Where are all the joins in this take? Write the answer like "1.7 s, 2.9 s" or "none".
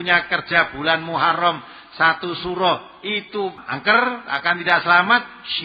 3.7 s